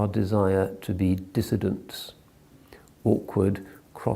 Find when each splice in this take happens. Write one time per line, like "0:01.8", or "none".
0:02.6